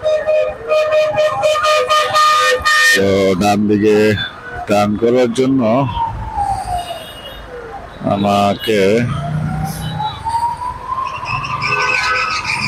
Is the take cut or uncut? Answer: uncut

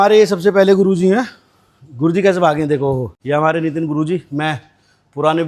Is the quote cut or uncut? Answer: uncut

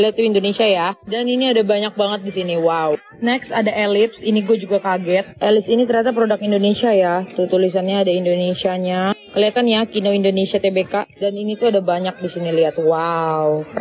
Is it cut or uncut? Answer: uncut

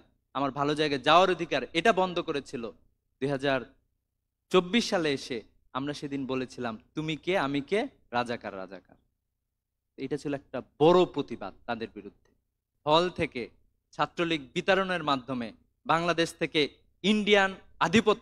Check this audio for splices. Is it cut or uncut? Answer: cut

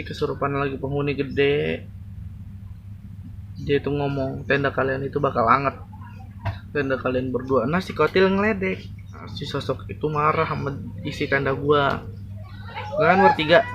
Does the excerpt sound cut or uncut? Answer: cut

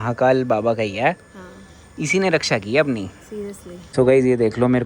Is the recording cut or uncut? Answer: cut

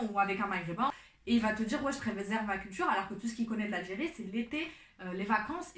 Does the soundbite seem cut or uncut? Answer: cut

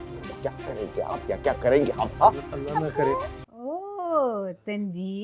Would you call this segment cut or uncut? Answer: cut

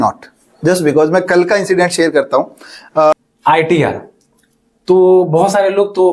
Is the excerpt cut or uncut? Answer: cut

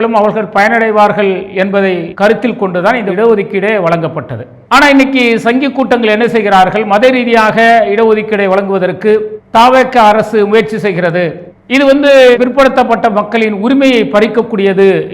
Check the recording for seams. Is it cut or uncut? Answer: cut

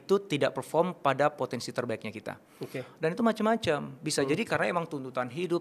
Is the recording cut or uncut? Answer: uncut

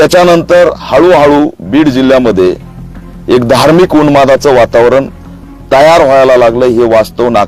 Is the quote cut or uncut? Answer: uncut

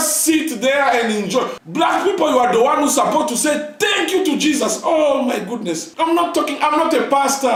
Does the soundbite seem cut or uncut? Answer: uncut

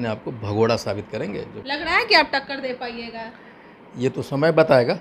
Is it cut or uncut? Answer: cut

